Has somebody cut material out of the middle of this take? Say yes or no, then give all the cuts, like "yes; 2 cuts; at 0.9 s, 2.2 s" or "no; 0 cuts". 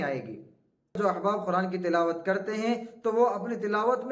yes; 1 cut; at 1.0 s